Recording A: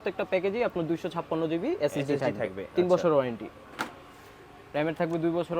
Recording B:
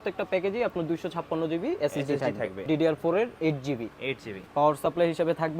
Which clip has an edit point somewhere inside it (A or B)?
B